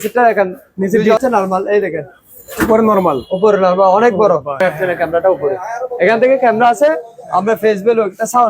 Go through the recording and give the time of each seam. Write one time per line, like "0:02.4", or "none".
0:01.2
0:04.6